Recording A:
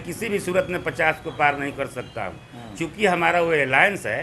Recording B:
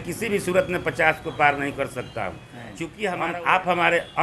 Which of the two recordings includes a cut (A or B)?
B